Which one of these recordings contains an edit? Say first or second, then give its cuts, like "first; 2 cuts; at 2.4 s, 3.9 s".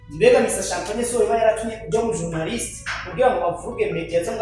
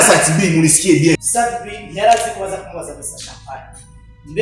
second; 1 cut; at 1.2 s